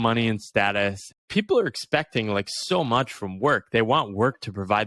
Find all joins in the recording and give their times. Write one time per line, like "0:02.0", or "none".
0:01.1